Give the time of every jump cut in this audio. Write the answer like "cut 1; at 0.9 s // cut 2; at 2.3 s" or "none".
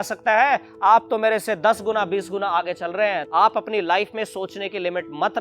cut 1; at 3.2 s